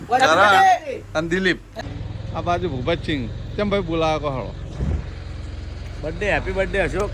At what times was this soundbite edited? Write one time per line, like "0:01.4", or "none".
0:01.7